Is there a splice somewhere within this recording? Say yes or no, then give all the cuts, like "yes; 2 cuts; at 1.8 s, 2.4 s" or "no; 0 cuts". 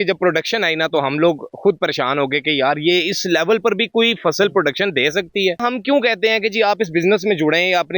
yes; 1 cut; at 5.6 s